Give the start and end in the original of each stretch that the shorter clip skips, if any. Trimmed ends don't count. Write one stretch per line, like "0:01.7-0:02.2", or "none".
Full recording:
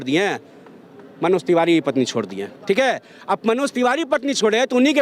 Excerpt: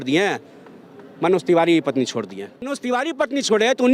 0:02.6-0:03.6